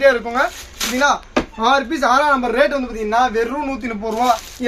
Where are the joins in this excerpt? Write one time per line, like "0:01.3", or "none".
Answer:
none